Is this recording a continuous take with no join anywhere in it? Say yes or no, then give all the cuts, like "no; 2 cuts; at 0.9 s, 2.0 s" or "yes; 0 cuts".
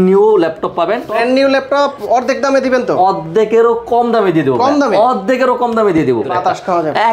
no; 2 cuts; at 1.1 s, 6.3 s